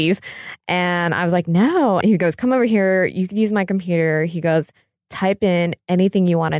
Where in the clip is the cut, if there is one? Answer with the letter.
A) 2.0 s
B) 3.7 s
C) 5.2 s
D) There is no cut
A